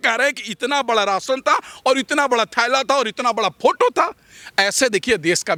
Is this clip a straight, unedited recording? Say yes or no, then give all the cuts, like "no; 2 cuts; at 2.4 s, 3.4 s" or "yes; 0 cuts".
yes; 0 cuts